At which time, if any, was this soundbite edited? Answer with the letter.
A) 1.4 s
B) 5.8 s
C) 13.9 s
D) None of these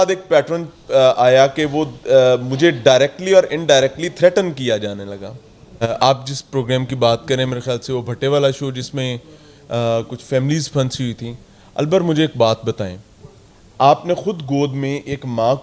B